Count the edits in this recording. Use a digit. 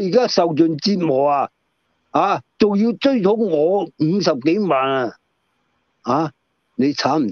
0